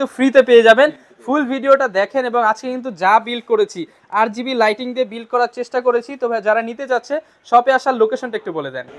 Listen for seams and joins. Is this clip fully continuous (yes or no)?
yes